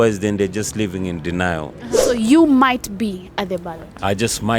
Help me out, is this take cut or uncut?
cut